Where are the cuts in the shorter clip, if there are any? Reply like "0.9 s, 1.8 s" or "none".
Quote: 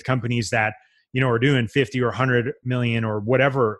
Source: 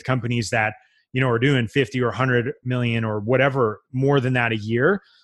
none